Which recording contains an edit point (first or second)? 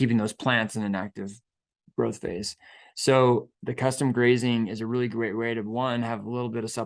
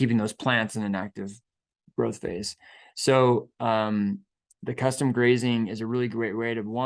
first